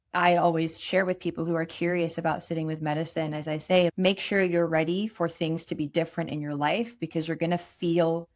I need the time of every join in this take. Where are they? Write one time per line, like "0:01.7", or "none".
0:03.9